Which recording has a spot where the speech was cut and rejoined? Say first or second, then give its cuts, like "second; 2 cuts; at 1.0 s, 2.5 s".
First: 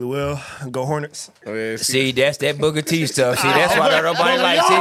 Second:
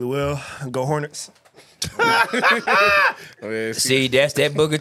first; 1 cut; at 1.3 s